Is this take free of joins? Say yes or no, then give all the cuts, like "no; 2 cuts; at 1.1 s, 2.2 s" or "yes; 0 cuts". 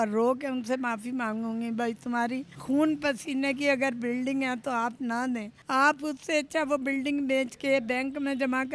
no; 2 cuts; at 2.5 s, 5.5 s